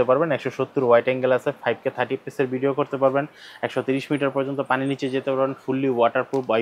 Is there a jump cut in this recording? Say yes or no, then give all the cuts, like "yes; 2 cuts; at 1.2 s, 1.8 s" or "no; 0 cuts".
no; 0 cuts